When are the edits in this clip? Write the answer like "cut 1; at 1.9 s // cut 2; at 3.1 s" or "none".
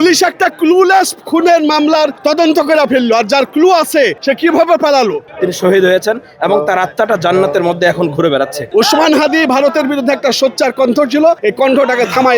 cut 1; at 2.2 s // cut 2; at 4.2 s // cut 3; at 5.3 s // cut 4; at 8.6 s // cut 5; at 11.4 s

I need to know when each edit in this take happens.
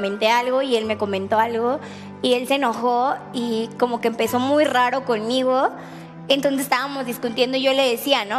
none

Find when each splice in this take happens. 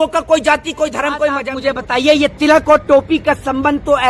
cut 1; at 1.5 s

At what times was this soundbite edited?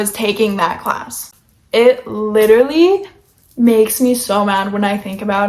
none

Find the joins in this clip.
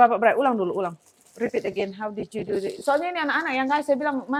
none

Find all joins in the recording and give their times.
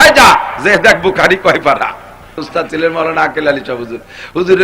cut 1; at 2.5 s

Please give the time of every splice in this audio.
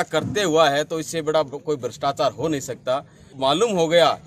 cut 1; at 3.3 s

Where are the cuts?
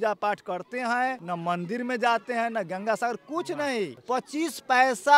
cut 1; at 1.2 s // cut 2; at 4.0 s

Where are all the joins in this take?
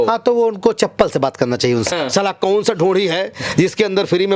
cut 1; at 1.9 s

